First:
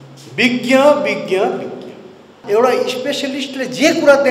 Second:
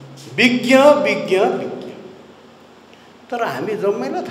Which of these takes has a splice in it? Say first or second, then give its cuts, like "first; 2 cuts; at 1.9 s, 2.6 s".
first; 1 cut; at 2.3 s